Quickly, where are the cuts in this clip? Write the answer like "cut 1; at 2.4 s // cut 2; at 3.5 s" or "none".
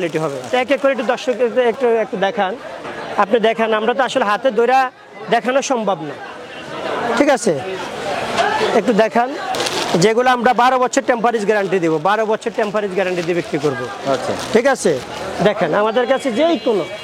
none